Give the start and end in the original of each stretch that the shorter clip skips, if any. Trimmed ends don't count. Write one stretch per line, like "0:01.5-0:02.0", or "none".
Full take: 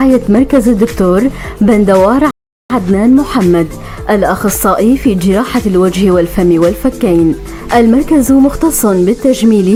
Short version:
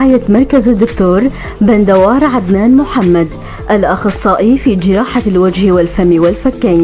0:02.3-0:02.7